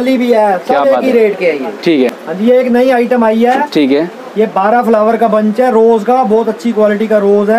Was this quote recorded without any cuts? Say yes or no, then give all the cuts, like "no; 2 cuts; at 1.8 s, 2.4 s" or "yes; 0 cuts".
no; 1 cut; at 2.2 s